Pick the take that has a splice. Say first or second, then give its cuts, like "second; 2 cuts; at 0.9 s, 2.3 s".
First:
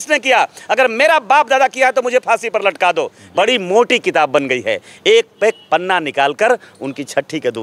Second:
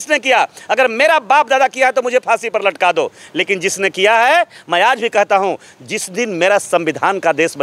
first; 1 cut; at 3.2 s